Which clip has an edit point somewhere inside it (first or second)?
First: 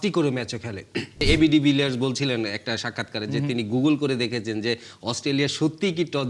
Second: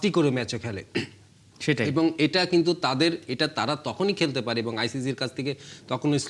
first